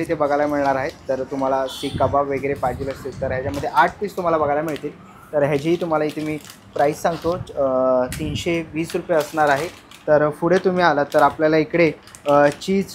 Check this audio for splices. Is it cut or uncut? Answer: uncut